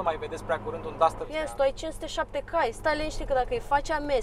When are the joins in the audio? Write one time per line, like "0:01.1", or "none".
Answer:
0:01.2